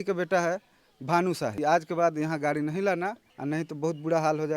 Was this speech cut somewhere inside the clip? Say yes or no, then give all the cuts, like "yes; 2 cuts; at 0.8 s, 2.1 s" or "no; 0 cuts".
yes; 2 cuts; at 1.5 s, 3.3 s